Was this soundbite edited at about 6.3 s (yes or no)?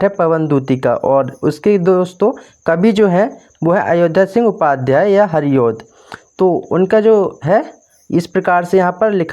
no